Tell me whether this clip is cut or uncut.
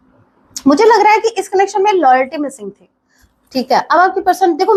uncut